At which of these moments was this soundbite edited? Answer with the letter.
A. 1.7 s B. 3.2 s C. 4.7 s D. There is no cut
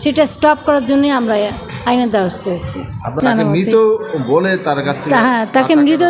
B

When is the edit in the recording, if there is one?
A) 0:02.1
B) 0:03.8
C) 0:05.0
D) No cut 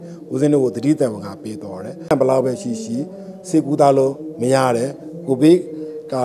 A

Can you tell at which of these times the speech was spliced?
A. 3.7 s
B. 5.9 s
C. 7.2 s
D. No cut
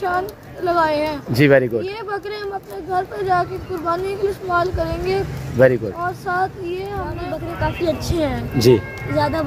C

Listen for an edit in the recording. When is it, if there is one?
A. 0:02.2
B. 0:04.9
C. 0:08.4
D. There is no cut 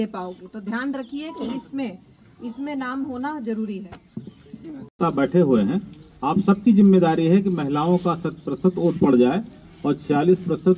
B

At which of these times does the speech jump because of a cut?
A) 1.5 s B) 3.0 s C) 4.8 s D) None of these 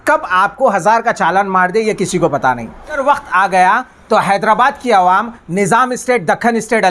B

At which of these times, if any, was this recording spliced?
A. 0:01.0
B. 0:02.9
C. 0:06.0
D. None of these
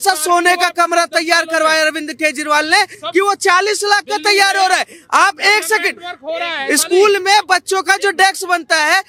D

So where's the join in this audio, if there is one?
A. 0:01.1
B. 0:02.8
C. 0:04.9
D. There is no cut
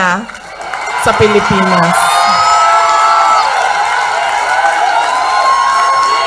D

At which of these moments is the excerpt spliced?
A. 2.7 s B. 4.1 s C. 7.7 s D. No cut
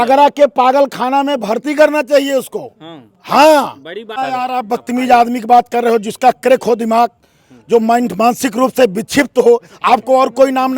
B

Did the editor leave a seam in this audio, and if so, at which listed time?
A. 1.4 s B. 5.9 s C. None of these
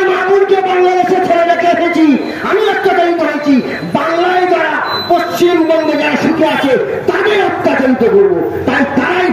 C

